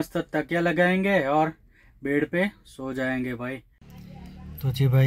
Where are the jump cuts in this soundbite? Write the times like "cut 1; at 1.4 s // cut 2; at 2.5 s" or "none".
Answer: none